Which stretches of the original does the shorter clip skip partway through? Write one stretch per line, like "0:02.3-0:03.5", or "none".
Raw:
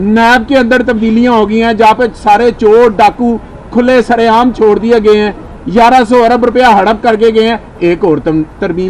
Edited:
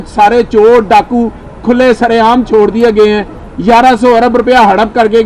none